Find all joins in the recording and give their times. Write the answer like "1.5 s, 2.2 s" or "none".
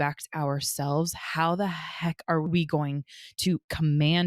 2.4 s